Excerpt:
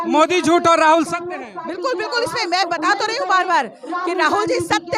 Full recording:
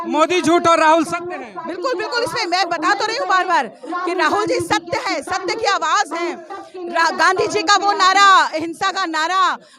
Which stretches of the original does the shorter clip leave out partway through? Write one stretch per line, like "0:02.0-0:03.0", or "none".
none